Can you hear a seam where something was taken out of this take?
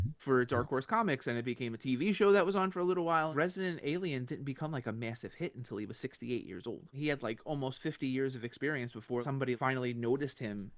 yes; 3 cuts; at 3.3 s, 7.0 s, 9.4 s

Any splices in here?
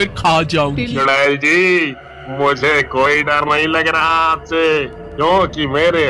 yes; 1 cut; at 0.9 s

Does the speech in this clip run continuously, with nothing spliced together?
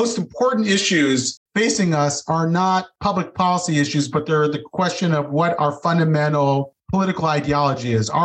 no; 3 cuts; at 1.4 s, 2.9 s, 6.8 s

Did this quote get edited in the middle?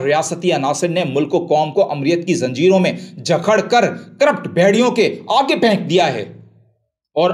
no; 0 cuts

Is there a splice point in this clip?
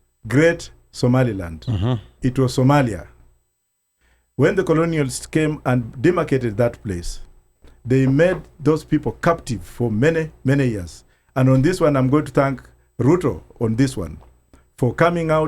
no; 0 cuts

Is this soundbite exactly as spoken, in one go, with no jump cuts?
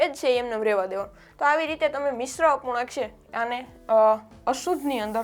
yes; 0 cuts

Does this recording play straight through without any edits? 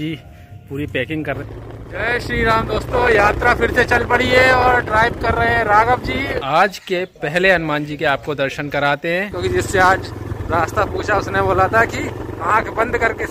no; 3 cuts; at 1.4 s, 6.4 s, 9.4 s

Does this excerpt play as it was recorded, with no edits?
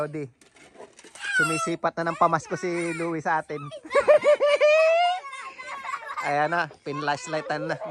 yes; 0 cuts

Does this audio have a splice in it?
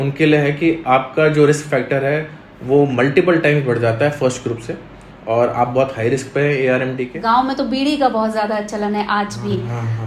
yes; 1 cut; at 7.2 s

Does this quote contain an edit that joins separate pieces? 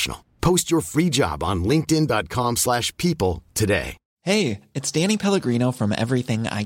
yes; 1 cut; at 4.0 s

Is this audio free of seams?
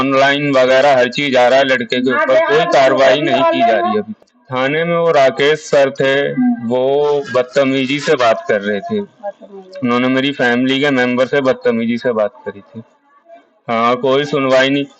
no; 1 cut; at 4.1 s

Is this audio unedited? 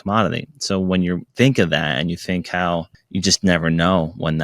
no; 2 cuts; at 1.3 s, 3.0 s

